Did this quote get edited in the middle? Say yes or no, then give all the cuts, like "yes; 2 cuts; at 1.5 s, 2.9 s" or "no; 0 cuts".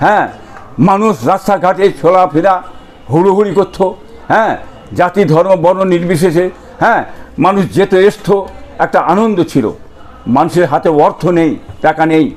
no; 0 cuts